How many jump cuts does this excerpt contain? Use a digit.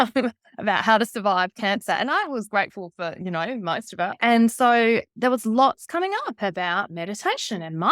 1